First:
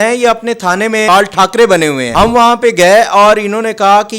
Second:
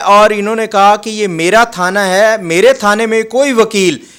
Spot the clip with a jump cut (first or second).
first